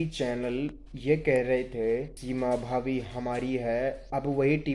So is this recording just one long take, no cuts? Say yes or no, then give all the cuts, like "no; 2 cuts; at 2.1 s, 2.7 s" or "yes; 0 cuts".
no; 1 cut; at 2.2 s